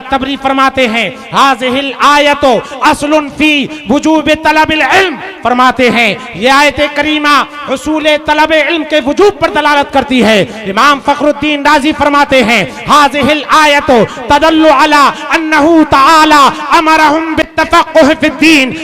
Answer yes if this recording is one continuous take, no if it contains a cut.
no